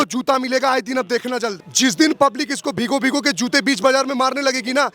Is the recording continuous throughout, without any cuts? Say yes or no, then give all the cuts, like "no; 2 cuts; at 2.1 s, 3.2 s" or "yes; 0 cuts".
no; 1 cut; at 1.6 s